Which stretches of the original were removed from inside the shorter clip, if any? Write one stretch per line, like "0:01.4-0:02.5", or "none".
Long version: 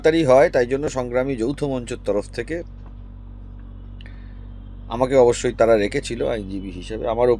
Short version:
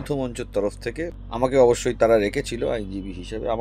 0:02.7-0:04.8